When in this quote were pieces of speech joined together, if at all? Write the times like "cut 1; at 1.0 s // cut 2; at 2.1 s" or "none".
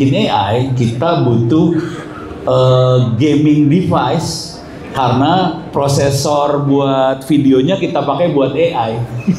none